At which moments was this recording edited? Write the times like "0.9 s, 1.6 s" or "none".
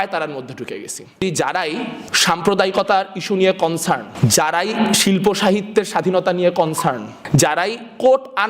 1.2 s, 2.0 s, 4.1 s, 7.1 s